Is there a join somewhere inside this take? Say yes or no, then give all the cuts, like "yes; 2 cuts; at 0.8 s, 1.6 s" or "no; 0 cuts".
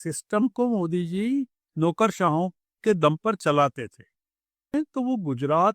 yes; 1 cut; at 4.7 s